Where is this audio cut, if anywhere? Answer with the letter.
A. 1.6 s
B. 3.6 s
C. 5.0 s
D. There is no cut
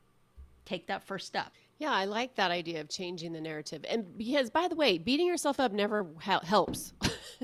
D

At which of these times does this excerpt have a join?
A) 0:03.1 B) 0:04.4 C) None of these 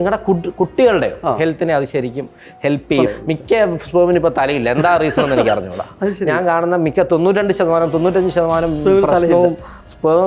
A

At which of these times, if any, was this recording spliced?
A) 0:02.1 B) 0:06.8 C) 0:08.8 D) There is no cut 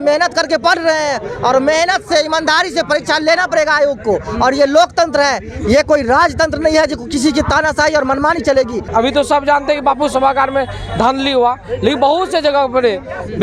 C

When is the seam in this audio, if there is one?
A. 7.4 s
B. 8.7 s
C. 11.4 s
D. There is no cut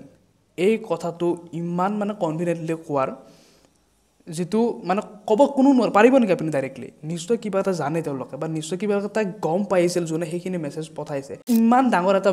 C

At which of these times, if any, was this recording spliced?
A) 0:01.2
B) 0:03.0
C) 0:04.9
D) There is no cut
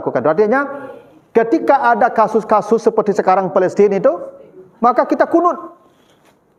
D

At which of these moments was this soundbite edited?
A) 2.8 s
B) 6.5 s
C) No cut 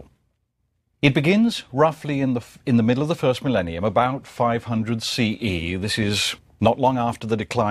C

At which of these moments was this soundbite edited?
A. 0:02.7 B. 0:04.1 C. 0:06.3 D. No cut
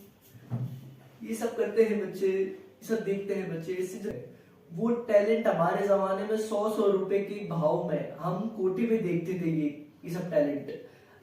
B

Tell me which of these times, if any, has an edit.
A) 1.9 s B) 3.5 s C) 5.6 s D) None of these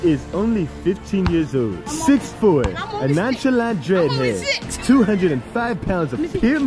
A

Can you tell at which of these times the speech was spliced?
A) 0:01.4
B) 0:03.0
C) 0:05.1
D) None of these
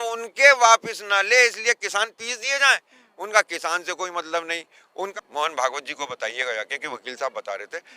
C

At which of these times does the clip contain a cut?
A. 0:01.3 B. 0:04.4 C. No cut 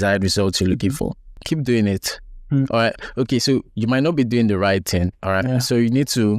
A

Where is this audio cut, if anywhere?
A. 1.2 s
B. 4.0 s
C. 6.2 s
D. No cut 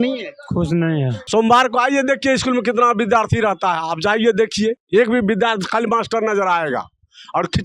A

